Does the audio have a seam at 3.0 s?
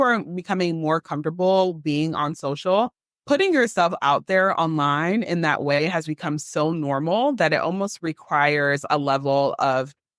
yes; 1 cut; at 3.0 s

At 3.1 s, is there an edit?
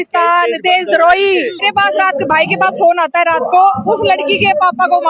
no; 1 cut; at 1.7 s

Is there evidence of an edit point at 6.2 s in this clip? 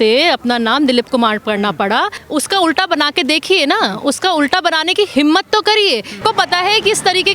yes; 2 cuts; at 2.2 s, 6.2 s

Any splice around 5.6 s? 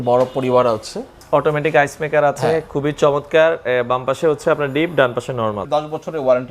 yes; 2 cuts; at 1.2 s, 5.6 s

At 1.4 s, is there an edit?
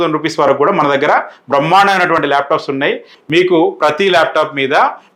no; 1 cut; at 3.1 s

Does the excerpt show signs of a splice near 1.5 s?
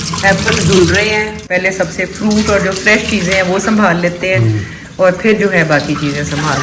yes; 1 cut; at 1.5 s

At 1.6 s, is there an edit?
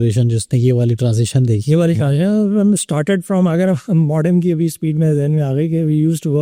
no; 0 cuts

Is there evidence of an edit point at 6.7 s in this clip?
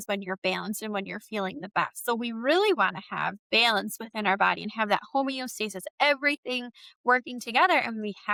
no; 0 cuts

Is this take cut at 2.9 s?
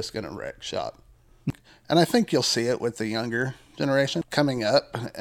no; 2 cuts; at 1.5 s, 4.2 s

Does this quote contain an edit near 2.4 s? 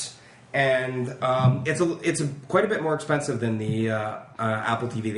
yes; 1 cut; at 2.4 s

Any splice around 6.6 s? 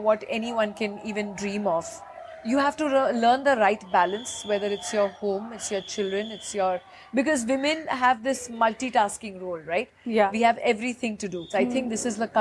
no; 1 cut; at 11.4 s

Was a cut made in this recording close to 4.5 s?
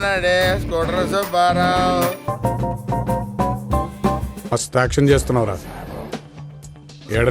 yes; 2 cuts; at 2.2 s, 4.5 s

